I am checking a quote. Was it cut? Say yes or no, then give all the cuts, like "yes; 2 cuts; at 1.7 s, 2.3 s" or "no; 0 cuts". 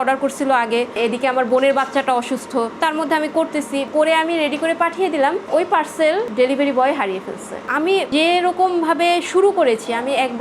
yes; 2 cuts; at 3.9 s, 7.6 s